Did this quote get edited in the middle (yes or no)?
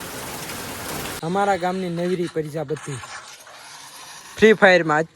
yes